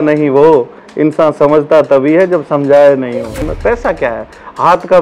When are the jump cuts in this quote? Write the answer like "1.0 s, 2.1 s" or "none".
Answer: 3.4 s